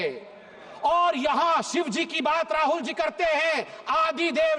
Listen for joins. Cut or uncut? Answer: uncut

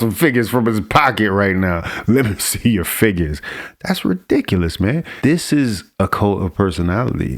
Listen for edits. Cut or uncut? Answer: cut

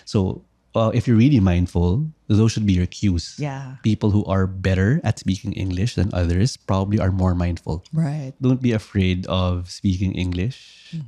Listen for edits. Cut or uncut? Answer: cut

